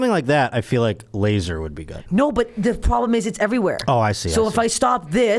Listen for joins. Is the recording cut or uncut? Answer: uncut